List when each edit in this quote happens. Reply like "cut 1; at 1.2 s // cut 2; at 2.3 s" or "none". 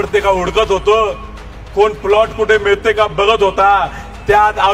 none